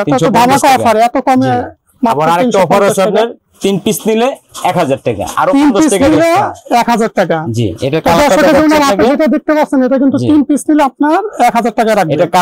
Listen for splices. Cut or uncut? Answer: uncut